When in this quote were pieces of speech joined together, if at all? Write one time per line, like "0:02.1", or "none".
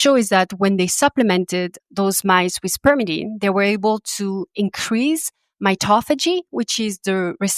0:01.8